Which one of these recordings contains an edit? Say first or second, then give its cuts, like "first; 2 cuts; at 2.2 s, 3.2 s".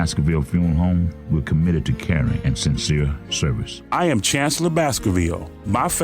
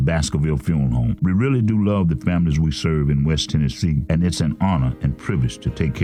first; 1 cut; at 3.7 s